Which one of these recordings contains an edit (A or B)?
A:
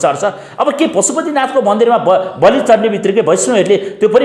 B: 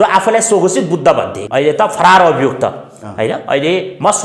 B